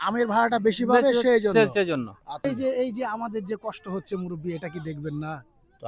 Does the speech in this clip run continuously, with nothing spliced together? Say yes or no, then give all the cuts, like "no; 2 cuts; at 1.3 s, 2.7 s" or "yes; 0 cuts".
no; 1 cut; at 2.5 s